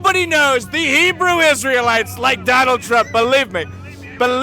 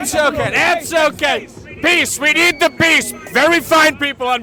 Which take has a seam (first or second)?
first